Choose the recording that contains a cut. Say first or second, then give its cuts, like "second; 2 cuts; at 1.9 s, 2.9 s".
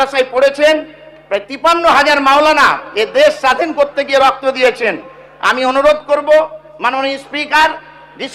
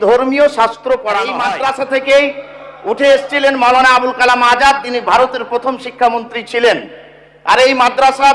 second; 1 cut; at 1.4 s